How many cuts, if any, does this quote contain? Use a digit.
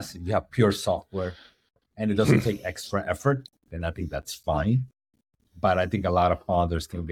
0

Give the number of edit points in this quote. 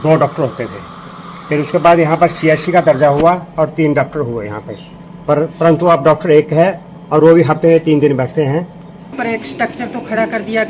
1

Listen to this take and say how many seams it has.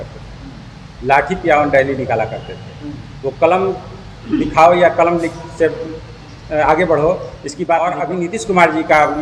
1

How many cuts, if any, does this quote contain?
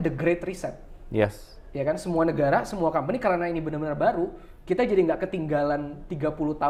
0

